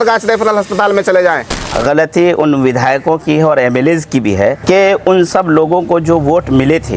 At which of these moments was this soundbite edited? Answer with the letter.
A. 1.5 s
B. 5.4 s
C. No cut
A